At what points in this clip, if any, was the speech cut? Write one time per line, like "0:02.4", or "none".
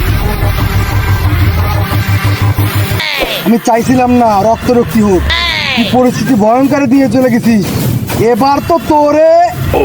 0:03.0